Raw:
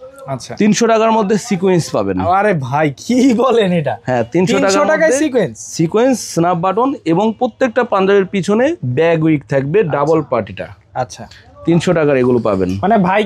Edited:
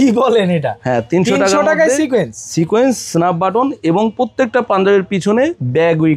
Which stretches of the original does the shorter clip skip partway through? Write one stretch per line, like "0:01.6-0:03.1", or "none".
none

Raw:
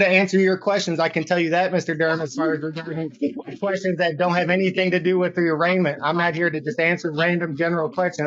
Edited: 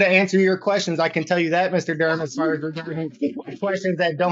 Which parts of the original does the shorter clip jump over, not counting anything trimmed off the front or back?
none

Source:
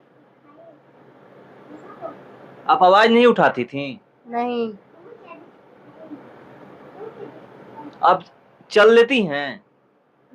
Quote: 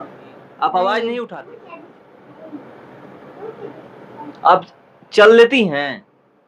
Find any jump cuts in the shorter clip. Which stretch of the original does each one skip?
0:03.3-0:04.9

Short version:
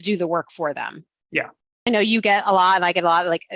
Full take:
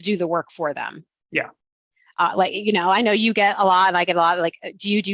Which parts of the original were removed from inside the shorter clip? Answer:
0:01.9-0:03.0

